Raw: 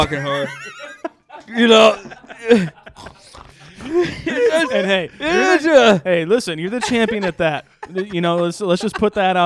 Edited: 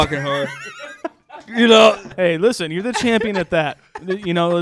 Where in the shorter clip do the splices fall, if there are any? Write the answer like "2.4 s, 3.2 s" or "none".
2.1 s